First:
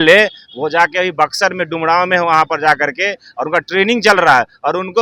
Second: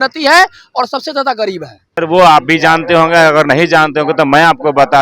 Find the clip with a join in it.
second; 1 cut; at 2.0 s

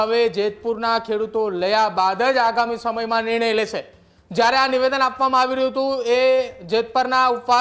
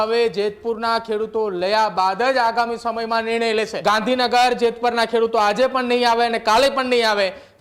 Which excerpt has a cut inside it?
second; 1 cut; at 3.7 s

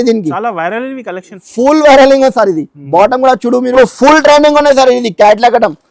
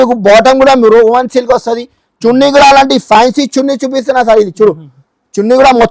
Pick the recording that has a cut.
first; 1 cut; at 3.7 s

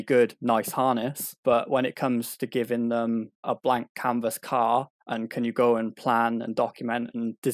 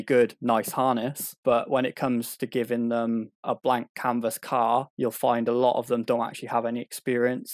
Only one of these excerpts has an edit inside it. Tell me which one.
second; 1 cut; at 4.9 s

